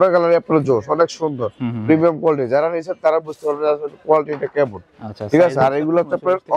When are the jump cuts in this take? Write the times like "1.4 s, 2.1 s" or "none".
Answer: none